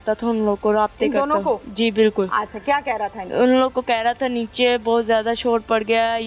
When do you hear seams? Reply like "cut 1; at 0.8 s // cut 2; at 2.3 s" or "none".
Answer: none